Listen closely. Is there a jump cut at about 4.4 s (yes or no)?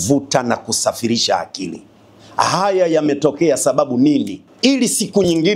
yes